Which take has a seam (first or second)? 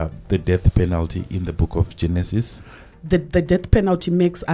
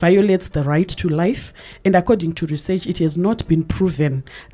first